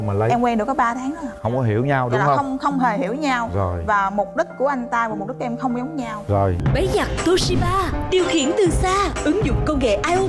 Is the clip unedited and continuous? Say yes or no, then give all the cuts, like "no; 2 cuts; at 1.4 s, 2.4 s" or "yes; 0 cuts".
no; 1 cut; at 6.6 s